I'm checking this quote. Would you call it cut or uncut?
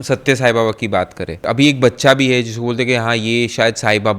cut